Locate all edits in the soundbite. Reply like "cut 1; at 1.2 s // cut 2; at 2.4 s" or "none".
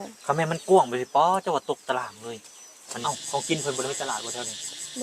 cut 1; at 2.9 s